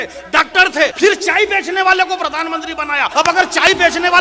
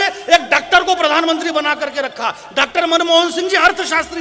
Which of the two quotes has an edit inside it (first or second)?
first